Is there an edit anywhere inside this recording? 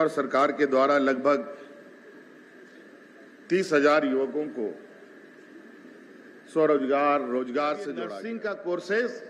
yes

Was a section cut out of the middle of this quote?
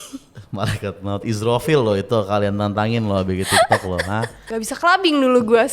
yes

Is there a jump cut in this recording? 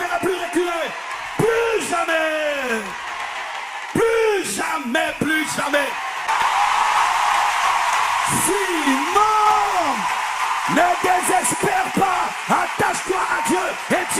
yes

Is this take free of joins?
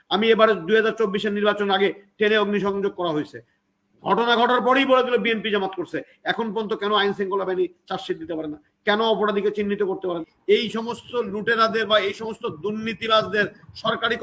no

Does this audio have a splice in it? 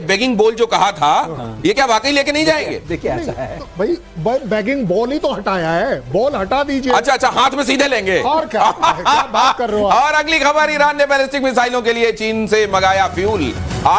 no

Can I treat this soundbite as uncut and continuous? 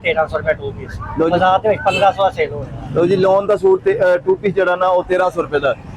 yes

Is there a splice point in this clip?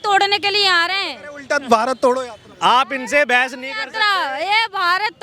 no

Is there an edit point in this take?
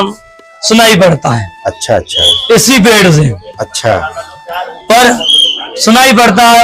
no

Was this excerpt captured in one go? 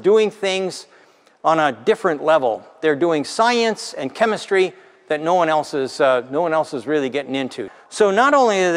no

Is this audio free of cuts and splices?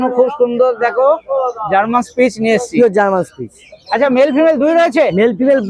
yes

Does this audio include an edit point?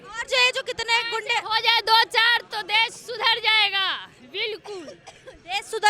no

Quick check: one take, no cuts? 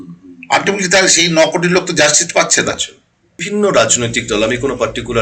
no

